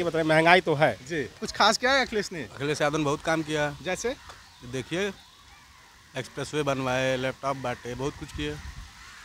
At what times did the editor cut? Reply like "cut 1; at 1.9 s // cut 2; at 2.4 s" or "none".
cut 1; at 1.5 s